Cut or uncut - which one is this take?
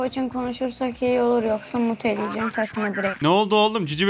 uncut